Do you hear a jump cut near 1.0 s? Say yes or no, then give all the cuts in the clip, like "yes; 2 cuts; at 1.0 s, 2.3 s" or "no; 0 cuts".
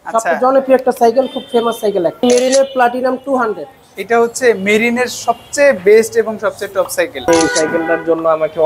no; 2 cuts; at 2.2 s, 7.3 s